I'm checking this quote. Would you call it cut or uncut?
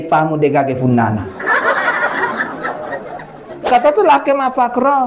cut